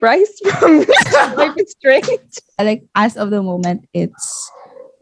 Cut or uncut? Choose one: cut